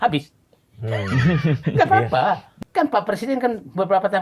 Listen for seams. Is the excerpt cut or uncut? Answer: cut